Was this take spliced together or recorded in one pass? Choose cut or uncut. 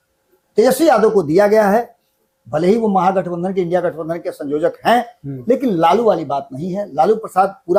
uncut